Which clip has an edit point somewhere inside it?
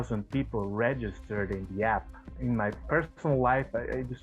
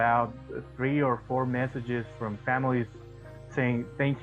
first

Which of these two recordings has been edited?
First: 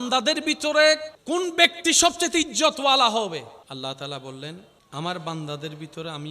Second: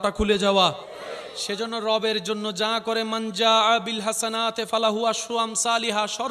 first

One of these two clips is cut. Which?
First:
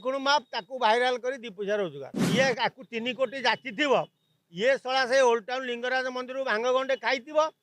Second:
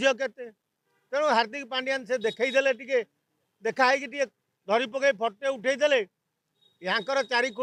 first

